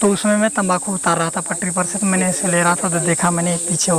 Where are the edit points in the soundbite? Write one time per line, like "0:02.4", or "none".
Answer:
none